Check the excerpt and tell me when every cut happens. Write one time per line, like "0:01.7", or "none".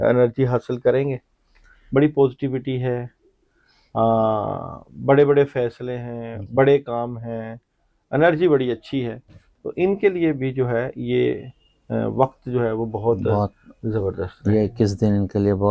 none